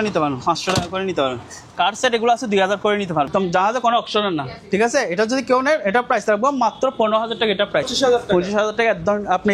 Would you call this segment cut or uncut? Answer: cut